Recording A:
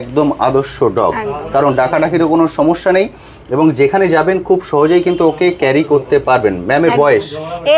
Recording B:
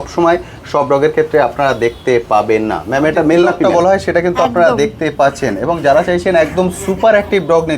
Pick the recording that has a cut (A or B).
B